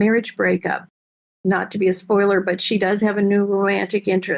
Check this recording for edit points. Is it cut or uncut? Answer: uncut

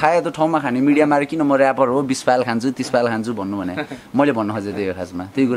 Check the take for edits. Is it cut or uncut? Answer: uncut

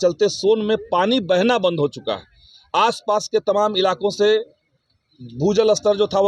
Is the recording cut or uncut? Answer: uncut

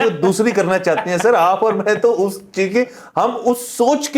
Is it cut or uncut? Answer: uncut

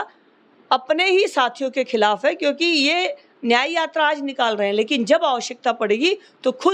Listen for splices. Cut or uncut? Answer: uncut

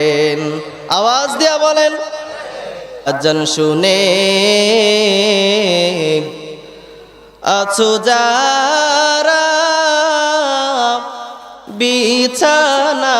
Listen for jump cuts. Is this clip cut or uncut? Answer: cut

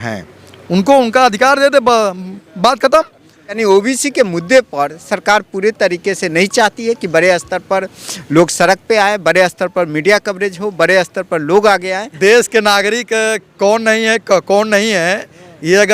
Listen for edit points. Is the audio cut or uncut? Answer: cut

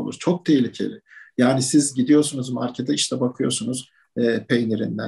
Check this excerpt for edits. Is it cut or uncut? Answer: uncut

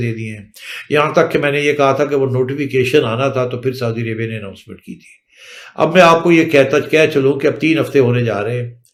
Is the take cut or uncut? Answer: uncut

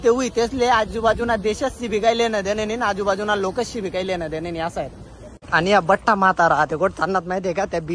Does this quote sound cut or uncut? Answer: uncut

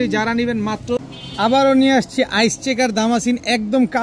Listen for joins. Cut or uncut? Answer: cut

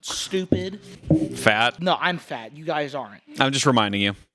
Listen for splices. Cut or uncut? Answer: cut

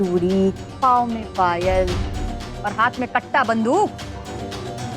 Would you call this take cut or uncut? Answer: uncut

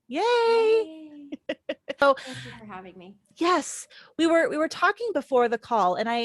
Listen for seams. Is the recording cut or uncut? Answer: cut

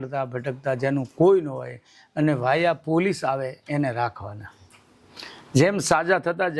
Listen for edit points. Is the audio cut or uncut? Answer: uncut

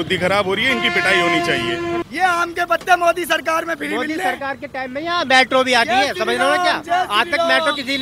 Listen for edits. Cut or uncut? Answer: cut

